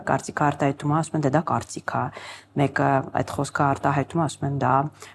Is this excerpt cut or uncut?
uncut